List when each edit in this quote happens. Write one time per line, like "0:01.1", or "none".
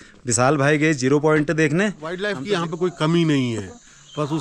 0:02.6